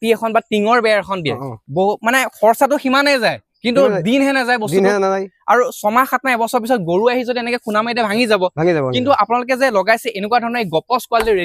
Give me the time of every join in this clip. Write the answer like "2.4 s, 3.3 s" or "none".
none